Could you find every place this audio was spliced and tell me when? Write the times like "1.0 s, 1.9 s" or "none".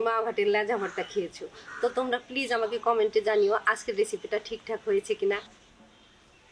5.4 s